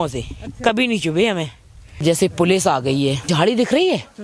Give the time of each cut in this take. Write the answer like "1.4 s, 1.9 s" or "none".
2.0 s, 3.3 s